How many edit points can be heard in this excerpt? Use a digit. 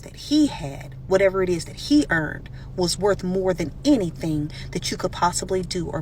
0